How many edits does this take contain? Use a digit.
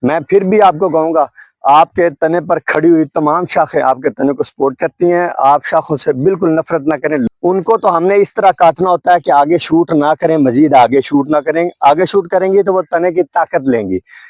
1